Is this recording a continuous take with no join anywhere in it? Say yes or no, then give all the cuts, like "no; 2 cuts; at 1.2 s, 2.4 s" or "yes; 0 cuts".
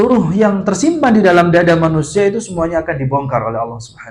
yes; 0 cuts